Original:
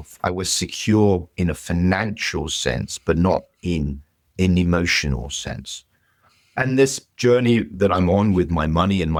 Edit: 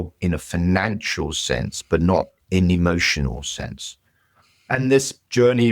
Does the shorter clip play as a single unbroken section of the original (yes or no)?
no